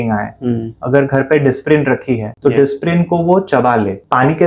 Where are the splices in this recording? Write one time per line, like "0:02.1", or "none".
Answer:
none